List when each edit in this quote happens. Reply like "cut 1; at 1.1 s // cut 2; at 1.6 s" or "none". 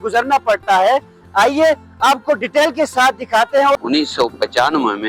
cut 1; at 3.8 s